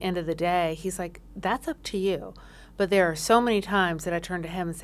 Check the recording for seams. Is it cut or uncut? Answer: uncut